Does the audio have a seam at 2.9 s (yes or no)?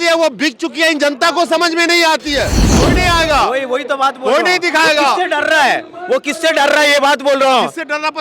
yes